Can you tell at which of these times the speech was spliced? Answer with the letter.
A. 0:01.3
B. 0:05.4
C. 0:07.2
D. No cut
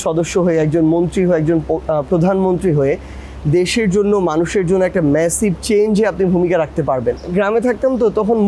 C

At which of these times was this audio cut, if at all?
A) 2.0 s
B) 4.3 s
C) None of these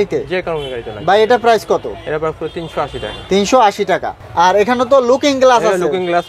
C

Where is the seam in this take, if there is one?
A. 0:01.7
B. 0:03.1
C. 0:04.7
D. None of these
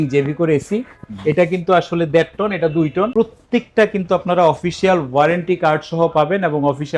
B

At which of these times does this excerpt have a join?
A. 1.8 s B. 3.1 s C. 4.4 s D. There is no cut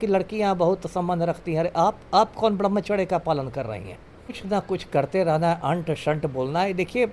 C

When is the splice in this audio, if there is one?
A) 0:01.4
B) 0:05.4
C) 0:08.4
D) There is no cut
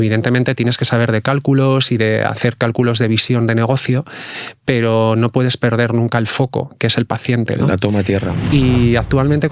C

